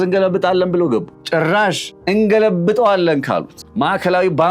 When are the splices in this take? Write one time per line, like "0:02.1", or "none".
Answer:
0:01.2
0:01.9
0:03.6